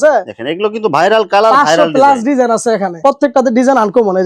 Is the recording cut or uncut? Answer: cut